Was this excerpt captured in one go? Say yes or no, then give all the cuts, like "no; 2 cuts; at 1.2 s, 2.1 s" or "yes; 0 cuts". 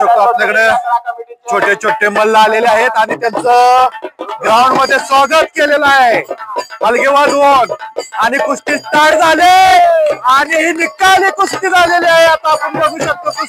yes; 0 cuts